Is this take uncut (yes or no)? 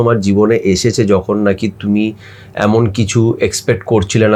yes